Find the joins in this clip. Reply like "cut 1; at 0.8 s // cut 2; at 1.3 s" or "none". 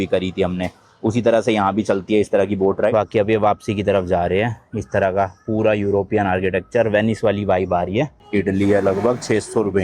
cut 1; at 2.9 s // cut 2; at 8.2 s